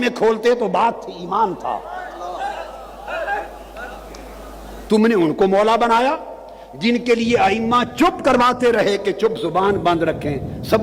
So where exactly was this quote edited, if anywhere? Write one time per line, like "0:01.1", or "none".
none